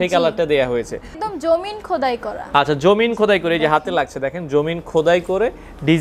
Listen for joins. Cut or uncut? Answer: cut